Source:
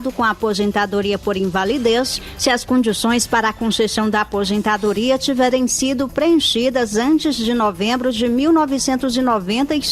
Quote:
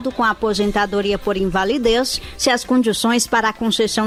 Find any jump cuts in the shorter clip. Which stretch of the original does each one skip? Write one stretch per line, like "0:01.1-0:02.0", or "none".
none